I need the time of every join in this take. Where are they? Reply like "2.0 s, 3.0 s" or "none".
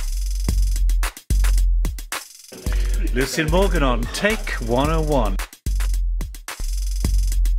1.2 s